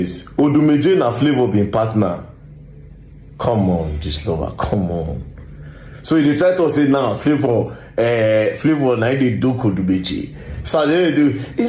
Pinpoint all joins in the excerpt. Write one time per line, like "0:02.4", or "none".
none